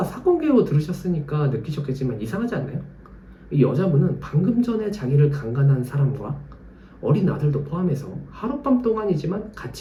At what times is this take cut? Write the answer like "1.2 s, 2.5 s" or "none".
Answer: none